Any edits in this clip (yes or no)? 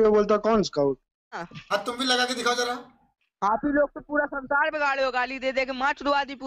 yes